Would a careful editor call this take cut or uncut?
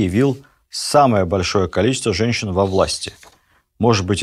uncut